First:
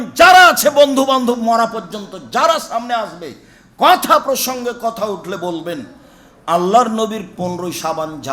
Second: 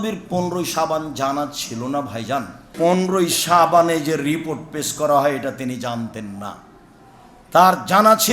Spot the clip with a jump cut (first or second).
second